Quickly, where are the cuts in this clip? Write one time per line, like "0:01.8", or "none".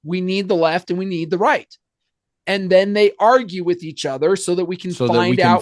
none